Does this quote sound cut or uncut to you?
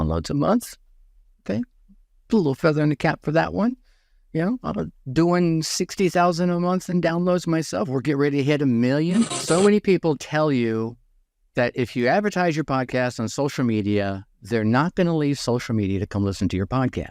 cut